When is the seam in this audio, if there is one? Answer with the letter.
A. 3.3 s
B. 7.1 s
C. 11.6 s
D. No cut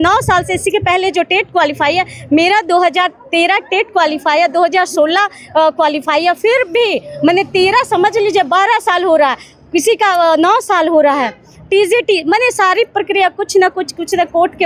D